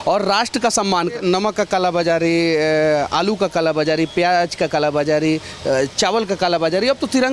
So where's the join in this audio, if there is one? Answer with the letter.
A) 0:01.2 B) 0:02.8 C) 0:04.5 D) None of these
A